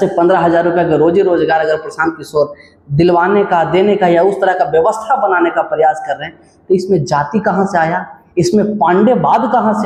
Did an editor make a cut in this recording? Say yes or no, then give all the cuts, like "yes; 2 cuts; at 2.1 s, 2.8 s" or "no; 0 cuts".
no; 0 cuts